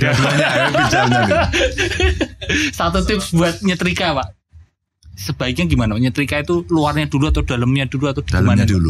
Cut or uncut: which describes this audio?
uncut